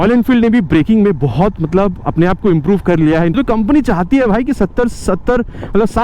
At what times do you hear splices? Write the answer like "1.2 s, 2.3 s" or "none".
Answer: 3.3 s